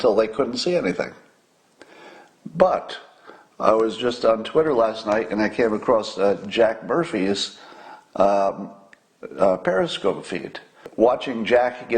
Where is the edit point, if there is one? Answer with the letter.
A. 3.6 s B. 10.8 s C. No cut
B